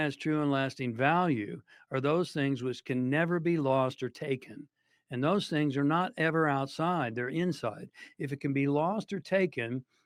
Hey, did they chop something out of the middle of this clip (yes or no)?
no